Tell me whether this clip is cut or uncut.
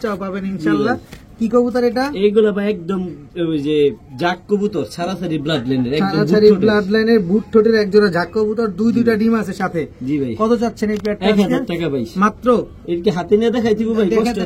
uncut